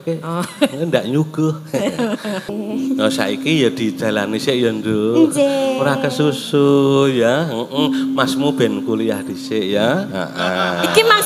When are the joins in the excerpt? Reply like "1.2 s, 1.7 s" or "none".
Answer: 2.5 s